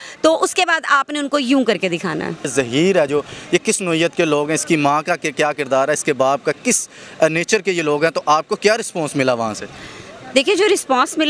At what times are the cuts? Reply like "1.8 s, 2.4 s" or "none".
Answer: 2.5 s